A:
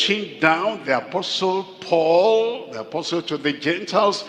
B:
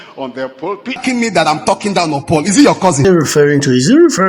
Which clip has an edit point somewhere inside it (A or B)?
B